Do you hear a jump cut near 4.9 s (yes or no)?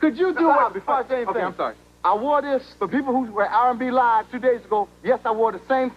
no